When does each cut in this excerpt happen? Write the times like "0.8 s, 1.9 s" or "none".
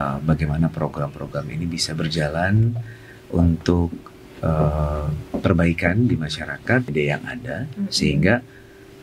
6.9 s

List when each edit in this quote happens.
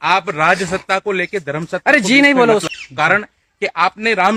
none

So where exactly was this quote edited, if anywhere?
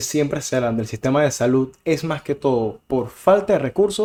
none

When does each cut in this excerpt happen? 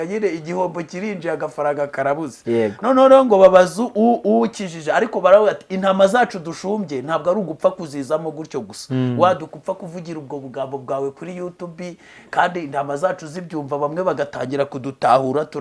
none

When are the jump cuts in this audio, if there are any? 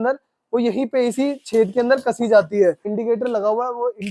2.9 s

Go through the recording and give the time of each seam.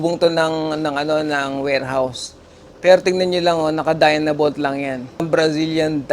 5.2 s

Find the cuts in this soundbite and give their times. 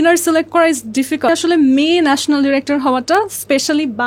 1.3 s

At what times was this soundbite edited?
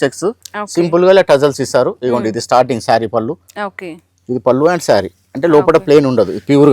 none

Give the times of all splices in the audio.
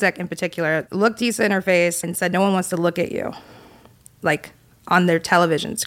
0.9 s, 2.1 s

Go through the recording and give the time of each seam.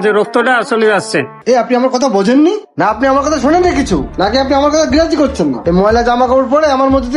1.3 s

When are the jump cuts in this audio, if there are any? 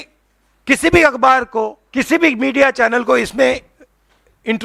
1.8 s

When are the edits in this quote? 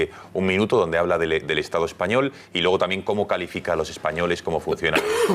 3.2 s

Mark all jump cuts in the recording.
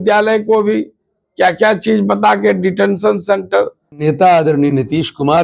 4.0 s

